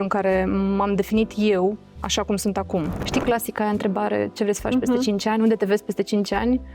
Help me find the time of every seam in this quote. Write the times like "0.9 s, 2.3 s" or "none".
3.0 s